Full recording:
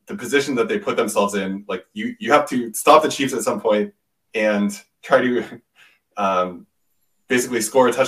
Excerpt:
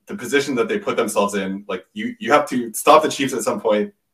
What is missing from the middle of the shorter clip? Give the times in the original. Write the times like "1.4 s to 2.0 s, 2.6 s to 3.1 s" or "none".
none